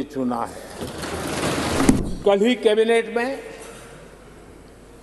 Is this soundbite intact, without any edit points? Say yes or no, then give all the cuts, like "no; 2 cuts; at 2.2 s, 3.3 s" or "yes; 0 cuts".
no; 1 cut; at 2.0 s